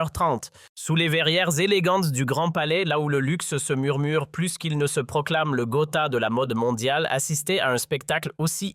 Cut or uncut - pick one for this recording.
cut